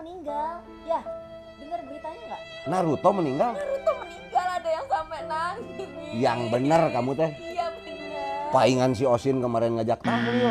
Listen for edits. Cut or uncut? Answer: uncut